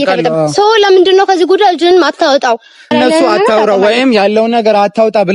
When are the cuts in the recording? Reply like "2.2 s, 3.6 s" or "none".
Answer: 2.9 s